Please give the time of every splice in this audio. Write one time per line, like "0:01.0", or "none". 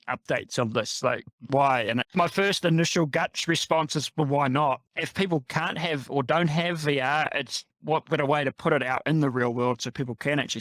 0:02.1
0:04.8